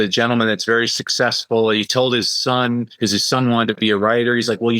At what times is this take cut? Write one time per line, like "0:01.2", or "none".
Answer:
0:02.9